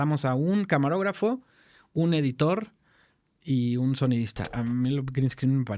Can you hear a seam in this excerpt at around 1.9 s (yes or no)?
no